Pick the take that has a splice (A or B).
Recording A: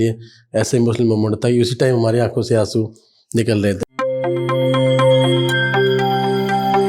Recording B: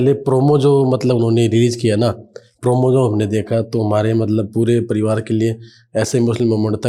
A